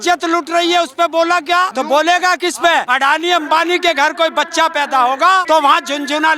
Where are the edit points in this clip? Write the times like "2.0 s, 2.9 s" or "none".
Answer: 1.7 s, 2.9 s, 5.4 s